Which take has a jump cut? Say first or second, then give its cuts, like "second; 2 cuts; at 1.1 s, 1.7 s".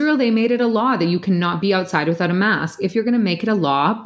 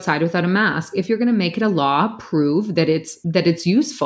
second; 1 cut; at 3.2 s